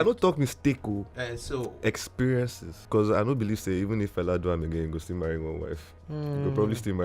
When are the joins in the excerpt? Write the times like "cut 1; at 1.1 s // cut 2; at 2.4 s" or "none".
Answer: cut 1; at 2.8 s